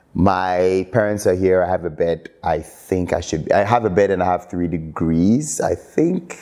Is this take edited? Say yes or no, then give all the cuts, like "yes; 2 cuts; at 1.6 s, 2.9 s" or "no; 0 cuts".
no; 0 cuts